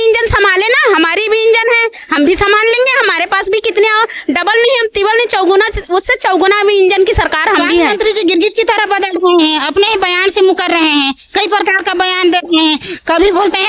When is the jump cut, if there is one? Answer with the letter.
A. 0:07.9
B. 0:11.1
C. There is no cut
A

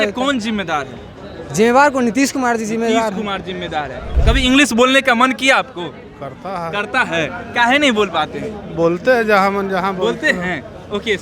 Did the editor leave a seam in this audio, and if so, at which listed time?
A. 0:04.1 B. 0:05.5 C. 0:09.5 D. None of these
A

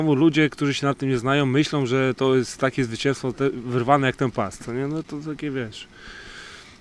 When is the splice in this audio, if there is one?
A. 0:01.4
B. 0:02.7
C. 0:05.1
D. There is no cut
D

